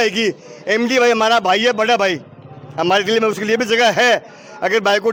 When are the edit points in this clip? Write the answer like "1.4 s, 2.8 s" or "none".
none